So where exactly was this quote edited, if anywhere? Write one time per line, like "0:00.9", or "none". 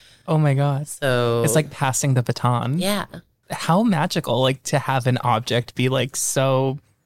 0:03.4